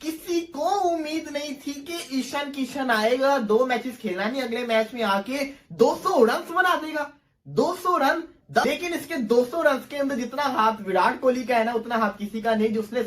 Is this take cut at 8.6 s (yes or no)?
yes